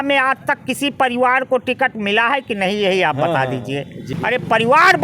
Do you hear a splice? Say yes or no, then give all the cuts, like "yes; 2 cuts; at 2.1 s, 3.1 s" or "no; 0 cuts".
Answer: yes; 1 cut; at 4.1 s